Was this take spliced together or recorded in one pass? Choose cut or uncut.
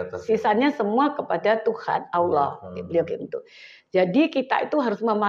uncut